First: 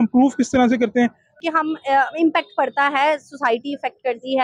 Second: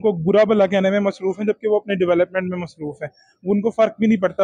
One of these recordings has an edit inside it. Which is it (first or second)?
first